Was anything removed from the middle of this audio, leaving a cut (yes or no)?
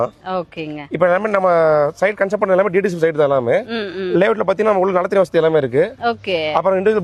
no